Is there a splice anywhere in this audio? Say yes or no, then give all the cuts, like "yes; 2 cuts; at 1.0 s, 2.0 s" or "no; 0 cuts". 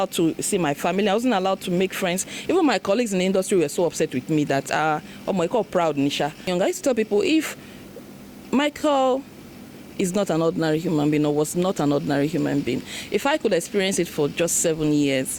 yes; 1 cut; at 6.5 s